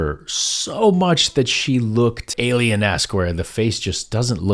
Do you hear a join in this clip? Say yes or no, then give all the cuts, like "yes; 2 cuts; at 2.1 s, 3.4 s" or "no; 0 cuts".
yes; 1 cut; at 2.3 s